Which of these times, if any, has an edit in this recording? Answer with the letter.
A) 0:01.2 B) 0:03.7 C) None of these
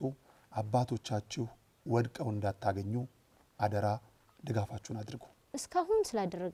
C